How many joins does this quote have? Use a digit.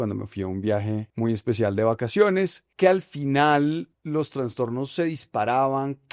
3